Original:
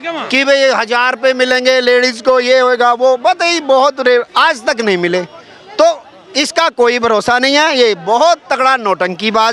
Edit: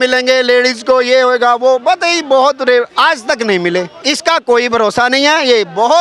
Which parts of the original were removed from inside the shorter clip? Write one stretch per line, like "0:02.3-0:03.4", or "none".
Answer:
0:05.3-0:06.3